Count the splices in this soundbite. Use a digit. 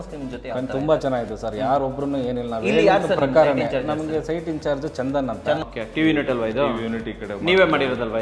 1